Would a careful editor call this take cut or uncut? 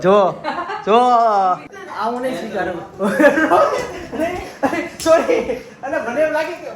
cut